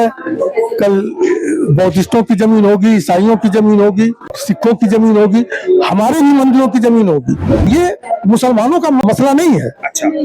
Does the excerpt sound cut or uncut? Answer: cut